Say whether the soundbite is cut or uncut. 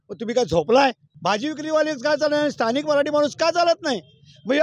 cut